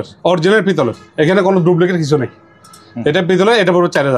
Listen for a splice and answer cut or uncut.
uncut